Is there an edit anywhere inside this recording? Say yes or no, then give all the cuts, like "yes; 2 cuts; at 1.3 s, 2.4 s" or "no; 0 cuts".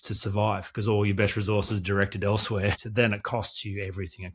yes; 1 cut; at 2.8 s